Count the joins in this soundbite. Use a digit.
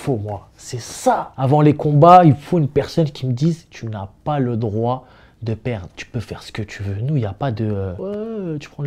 2